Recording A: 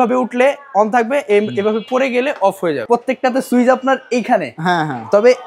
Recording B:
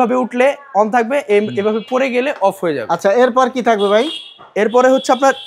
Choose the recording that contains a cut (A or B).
A